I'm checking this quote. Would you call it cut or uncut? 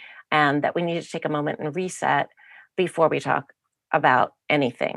uncut